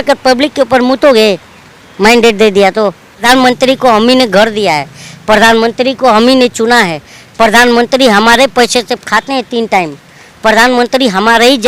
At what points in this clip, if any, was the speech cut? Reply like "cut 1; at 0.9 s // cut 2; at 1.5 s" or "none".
cut 1; at 3.2 s